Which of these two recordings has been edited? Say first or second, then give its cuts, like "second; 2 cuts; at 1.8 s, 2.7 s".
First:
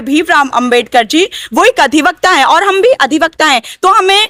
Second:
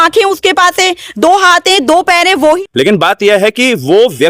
second; 1 cut; at 2.6 s